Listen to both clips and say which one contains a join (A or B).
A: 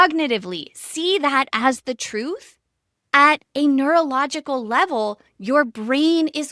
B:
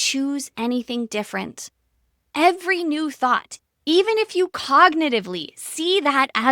B